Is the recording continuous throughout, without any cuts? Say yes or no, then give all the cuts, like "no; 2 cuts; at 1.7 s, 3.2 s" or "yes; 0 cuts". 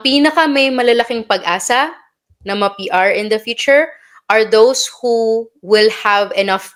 yes; 0 cuts